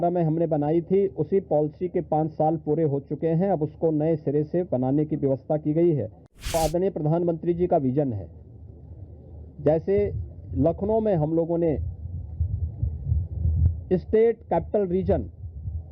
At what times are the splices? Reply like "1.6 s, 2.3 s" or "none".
6.5 s